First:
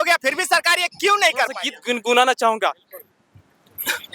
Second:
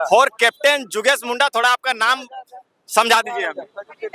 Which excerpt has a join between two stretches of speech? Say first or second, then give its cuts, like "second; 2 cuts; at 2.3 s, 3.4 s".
first; 1 cut; at 1.7 s